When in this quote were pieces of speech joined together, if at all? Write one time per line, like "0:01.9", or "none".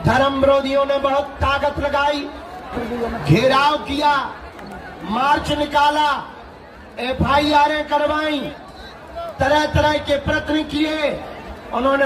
0:02.8